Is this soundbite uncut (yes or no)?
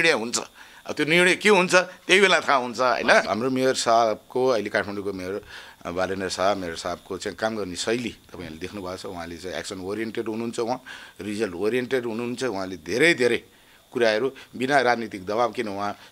no